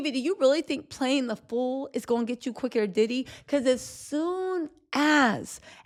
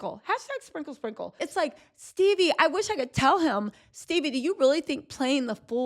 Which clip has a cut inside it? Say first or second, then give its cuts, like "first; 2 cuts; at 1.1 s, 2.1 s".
second; 1 cut; at 1.4 s